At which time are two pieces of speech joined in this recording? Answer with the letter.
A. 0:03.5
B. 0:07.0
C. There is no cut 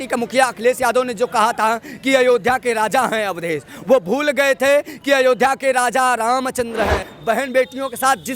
B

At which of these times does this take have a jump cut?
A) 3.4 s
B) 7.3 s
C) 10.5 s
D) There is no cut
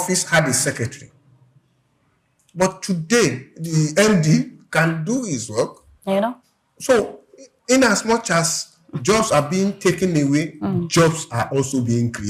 D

